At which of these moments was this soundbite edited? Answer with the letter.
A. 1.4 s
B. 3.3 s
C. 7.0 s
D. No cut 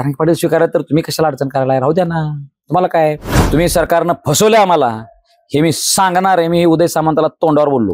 B